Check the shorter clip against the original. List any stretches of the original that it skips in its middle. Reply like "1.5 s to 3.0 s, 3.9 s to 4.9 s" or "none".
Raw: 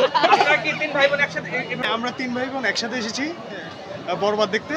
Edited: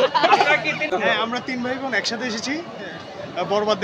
0.9 s to 1.6 s

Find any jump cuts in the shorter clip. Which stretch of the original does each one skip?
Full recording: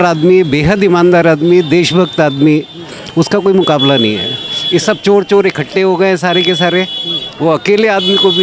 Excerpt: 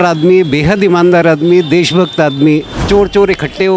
2.8 s to 5.0 s

